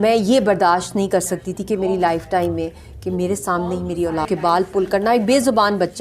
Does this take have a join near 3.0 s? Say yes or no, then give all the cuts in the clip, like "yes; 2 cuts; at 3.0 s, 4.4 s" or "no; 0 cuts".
no; 1 cut; at 4.3 s